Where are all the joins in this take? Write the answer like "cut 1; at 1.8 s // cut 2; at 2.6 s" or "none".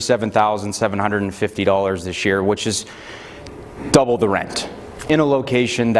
cut 1; at 5.0 s